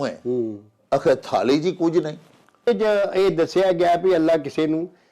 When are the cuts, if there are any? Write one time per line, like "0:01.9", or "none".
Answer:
0:02.7